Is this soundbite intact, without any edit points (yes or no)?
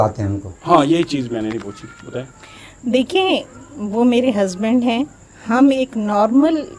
yes